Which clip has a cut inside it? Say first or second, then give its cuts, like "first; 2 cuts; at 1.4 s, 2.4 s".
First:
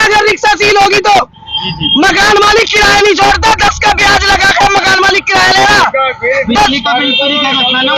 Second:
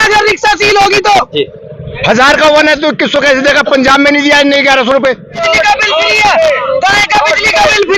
second; 2 cuts; at 1.4 s, 5.4 s